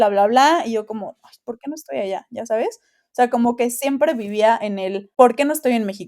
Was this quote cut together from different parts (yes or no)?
yes